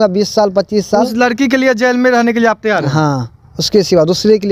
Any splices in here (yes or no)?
no